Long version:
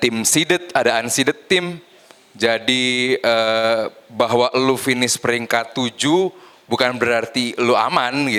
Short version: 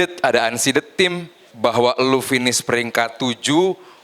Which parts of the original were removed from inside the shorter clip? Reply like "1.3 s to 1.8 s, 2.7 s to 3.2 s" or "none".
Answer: 2.0 s to 4.0 s